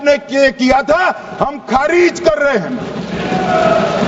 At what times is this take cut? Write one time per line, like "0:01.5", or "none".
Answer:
none